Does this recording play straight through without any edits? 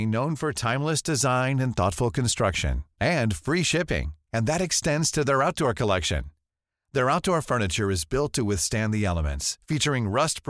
yes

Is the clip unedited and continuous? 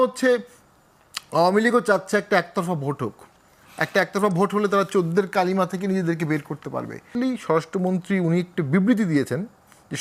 no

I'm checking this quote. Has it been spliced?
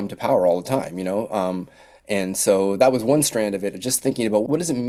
no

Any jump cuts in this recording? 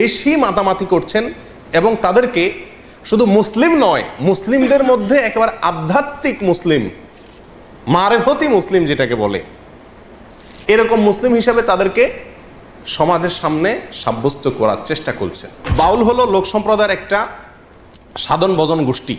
yes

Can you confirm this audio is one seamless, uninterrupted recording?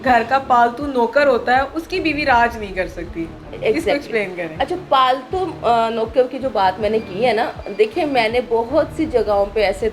yes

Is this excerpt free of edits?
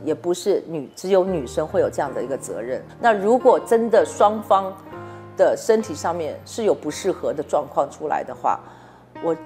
yes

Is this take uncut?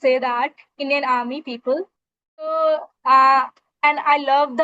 no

